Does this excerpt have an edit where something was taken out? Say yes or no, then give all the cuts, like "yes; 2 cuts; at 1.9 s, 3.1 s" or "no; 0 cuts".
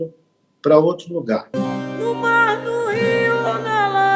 yes; 1 cut; at 1.5 s